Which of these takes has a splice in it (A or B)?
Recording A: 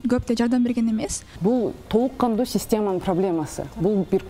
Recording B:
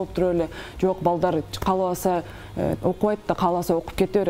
A